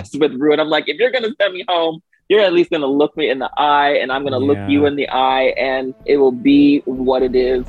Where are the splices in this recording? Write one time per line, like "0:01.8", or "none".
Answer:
0:06.0